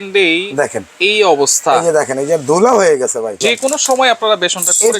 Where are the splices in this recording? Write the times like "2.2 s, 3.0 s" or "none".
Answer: 3.4 s